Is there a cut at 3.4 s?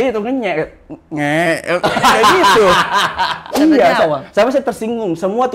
yes; 1 cut; at 3.4 s

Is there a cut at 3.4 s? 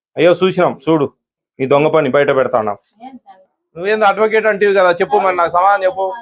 yes; 1 cut; at 3.4 s

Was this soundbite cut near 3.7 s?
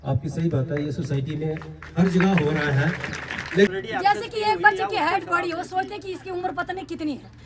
yes; 1 cut; at 3.7 s

